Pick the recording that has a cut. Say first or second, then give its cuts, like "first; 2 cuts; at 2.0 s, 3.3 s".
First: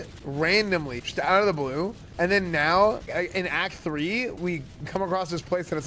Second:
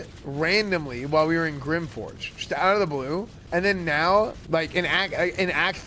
first; 3 cuts; at 1.0 s, 3.1 s, 4.4 s